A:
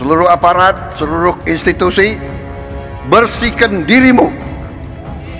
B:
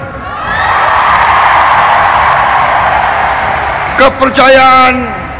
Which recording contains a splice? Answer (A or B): A